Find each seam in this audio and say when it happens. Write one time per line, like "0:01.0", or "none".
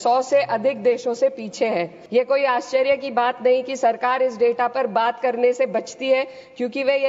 0:02.0